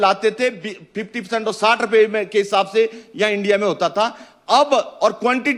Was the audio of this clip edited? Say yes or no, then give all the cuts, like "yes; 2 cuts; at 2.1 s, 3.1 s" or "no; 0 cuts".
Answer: no; 0 cuts